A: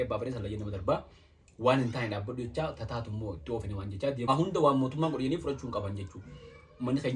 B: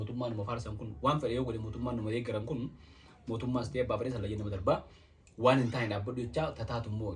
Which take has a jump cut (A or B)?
A